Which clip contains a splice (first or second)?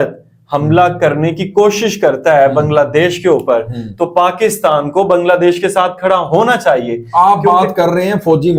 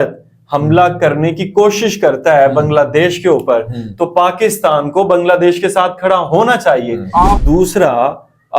second